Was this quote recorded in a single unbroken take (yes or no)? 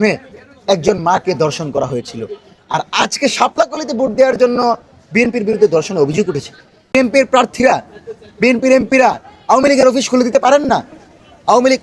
no